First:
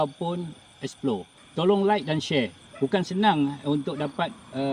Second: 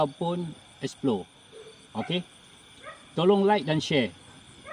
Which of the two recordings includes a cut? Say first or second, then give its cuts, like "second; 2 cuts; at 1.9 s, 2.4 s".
first; 2 cuts; at 1.4 s, 2.6 s